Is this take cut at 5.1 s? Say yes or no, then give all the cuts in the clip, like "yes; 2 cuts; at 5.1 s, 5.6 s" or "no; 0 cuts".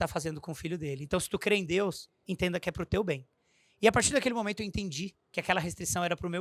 no; 0 cuts